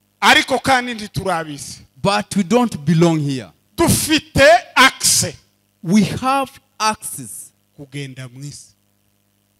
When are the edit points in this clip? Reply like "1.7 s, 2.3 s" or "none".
none